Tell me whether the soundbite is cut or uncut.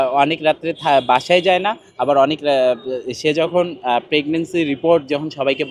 uncut